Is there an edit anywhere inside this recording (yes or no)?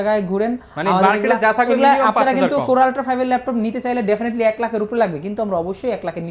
no